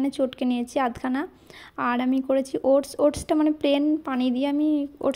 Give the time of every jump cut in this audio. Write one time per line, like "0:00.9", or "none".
none